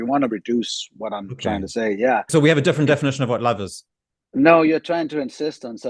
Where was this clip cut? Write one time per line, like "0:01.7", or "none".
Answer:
0:02.3

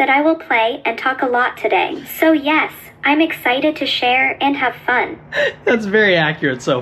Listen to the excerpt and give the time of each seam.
0:02.0
0:05.2

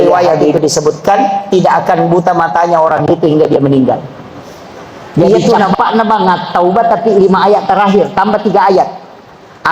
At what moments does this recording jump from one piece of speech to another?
0:05.7

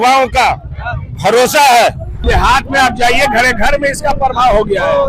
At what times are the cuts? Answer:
0:02.2

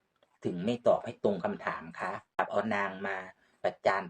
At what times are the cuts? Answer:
0:02.4

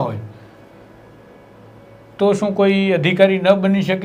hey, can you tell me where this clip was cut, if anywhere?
none

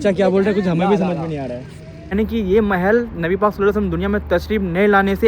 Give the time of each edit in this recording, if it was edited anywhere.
0:02.1

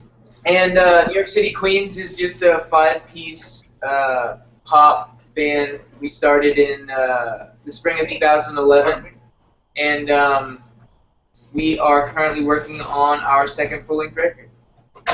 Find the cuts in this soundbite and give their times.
none

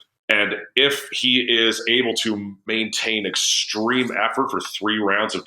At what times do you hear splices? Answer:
0:02.7

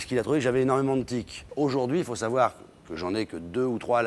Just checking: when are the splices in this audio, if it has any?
0:01.4

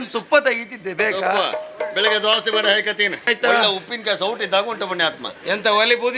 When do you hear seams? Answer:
0:03.3

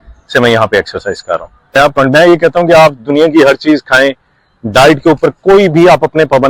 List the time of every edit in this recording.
0:01.9

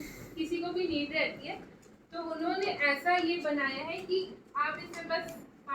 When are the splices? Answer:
none

